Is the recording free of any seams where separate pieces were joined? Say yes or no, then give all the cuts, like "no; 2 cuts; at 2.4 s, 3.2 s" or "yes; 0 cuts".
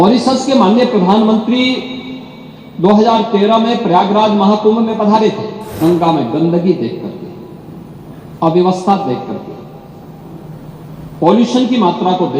no; 1 cut; at 5.8 s